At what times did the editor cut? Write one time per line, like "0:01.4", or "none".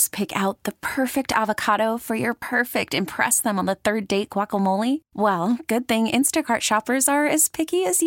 none